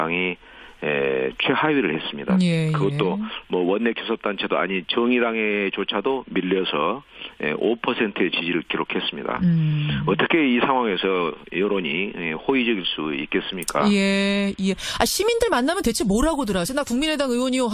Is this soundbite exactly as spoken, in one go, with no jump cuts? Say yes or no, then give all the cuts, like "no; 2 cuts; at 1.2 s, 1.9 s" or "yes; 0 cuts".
yes; 0 cuts